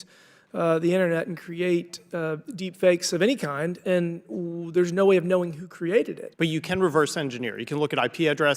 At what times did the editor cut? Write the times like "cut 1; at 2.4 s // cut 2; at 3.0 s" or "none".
cut 1; at 6.2 s